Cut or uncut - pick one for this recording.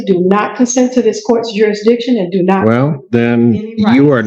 cut